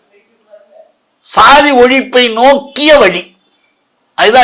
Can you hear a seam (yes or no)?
no